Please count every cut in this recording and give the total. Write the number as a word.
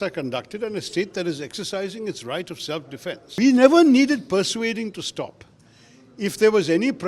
one